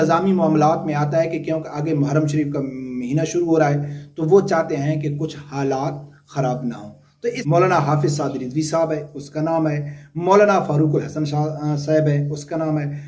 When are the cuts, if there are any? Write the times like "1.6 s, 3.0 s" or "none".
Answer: 7.4 s

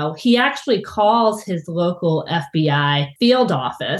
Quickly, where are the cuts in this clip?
3.1 s

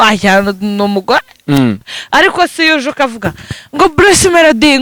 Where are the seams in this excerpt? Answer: 2.0 s

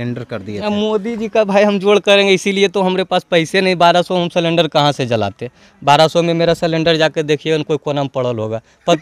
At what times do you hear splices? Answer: none

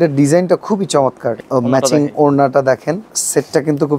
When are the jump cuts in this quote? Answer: 1.4 s, 3.1 s

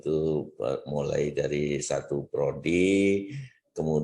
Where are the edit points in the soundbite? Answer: 2.2 s

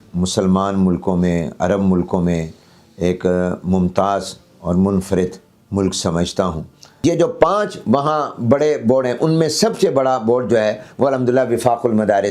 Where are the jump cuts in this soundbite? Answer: 7.0 s

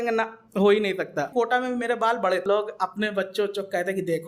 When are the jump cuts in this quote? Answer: 1.3 s, 2.4 s

